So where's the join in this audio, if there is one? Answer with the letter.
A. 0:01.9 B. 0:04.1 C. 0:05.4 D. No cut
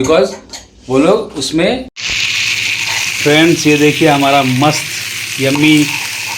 A